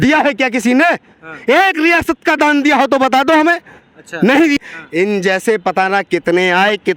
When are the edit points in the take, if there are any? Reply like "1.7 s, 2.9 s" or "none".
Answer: 4.6 s